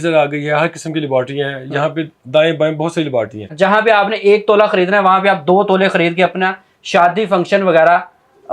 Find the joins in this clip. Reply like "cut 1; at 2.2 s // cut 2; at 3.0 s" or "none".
cut 1; at 3.5 s

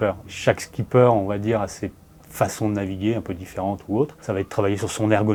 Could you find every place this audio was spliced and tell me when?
none

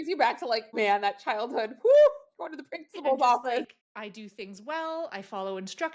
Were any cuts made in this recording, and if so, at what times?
cut 1; at 3.8 s

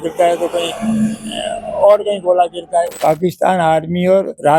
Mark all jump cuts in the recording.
cut 1; at 3.0 s

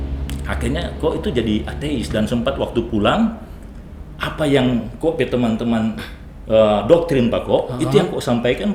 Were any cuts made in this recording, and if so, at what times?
none

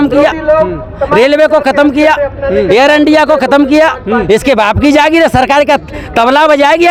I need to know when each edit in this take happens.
none

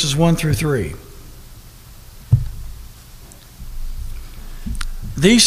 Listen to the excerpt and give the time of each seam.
none

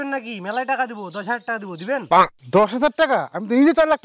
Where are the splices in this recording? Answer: none

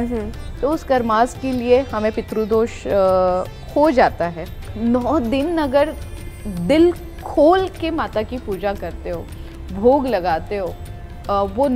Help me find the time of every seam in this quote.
cut 1; at 4.7 s

